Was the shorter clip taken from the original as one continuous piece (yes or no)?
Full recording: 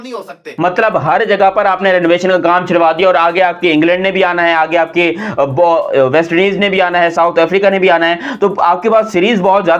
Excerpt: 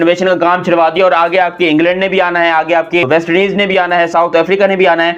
no